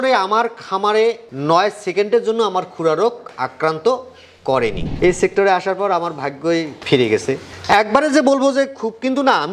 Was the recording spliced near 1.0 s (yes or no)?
no